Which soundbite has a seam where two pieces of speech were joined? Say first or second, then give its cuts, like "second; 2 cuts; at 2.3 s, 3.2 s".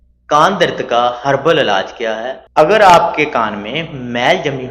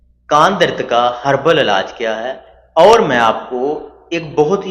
first; 1 cut; at 2.3 s